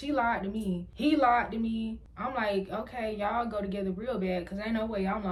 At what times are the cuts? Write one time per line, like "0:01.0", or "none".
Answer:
none